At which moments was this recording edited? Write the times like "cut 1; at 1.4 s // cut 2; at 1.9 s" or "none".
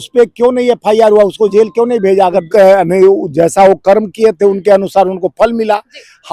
cut 1; at 2.5 s